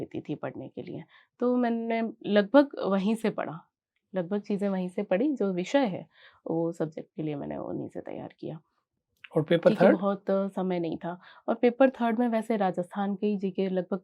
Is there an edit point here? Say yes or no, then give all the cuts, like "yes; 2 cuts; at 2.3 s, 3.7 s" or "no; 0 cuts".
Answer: no; 0 cuts